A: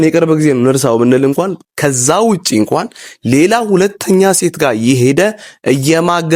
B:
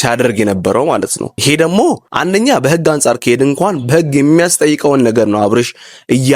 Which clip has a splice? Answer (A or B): B